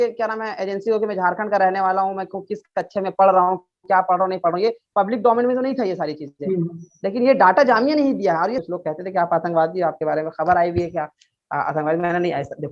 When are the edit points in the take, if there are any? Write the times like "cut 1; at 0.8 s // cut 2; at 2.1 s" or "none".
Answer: cut 1; at 8.6 s